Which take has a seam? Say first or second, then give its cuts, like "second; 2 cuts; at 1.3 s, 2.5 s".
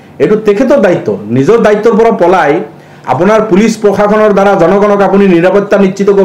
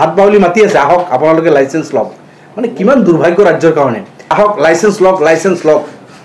second; 1 cut; at 4.2 s